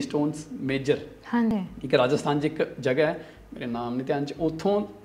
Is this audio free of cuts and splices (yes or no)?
no